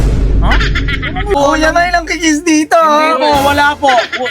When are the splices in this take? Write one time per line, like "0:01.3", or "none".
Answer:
0:01.4